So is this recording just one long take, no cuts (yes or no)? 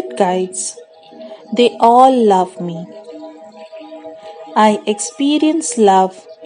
no